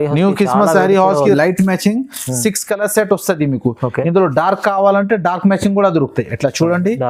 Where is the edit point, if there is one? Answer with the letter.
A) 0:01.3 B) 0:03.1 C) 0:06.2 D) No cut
A